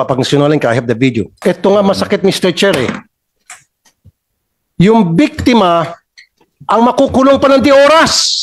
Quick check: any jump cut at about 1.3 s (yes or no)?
yes